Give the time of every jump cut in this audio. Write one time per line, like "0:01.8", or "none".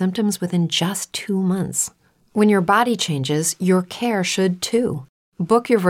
0:01.0